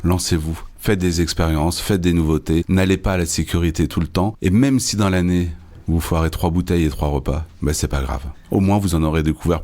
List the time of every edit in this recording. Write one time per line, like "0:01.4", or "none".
0:02.7
0:04.4
0:08.3